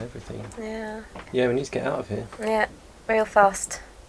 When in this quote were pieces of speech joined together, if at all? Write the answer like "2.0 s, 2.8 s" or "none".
1.2 s